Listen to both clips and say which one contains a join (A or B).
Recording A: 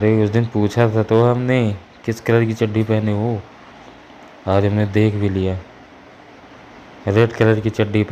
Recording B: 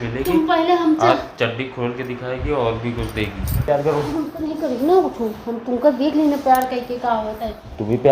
B